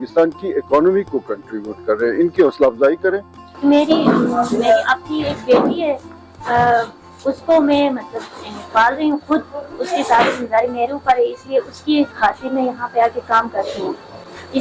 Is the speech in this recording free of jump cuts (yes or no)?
no